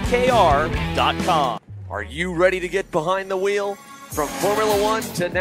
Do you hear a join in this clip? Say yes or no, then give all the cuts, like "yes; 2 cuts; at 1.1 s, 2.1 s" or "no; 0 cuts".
yes; 1 cut; at 1.8 s